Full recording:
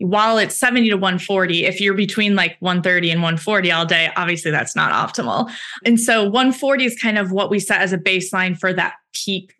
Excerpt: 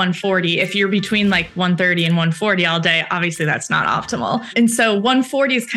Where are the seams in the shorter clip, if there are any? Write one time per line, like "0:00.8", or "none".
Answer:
0:04.5